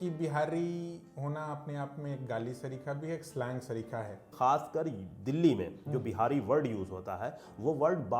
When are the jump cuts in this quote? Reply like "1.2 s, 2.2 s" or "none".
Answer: 4.3 s